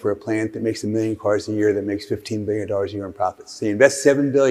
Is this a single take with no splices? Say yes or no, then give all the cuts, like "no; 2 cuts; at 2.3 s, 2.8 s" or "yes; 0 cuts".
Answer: yes; 0 cuts